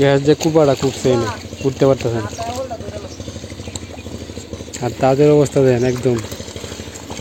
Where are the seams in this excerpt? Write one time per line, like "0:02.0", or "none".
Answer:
none